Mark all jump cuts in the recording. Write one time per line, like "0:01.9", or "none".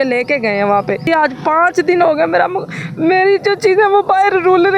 0:01.0